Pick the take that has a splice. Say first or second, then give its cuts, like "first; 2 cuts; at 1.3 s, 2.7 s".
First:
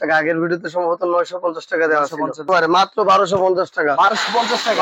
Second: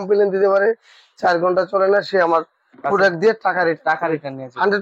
first; 1 cut; at 2.5 s